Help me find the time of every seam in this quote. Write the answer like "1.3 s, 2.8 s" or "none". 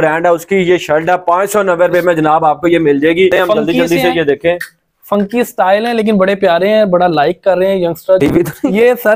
3.3 s, 8.2 s